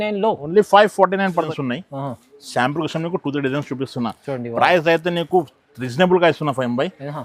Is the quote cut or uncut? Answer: cut